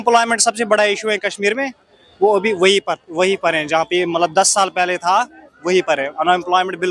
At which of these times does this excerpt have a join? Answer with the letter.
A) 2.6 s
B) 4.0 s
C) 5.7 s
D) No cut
D